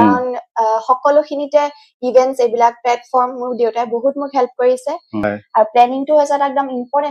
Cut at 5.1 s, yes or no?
yes